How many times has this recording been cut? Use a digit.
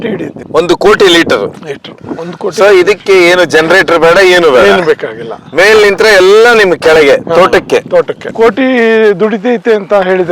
1